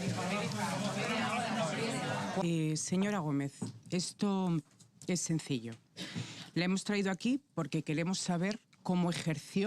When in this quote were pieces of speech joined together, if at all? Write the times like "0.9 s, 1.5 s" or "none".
2.4 s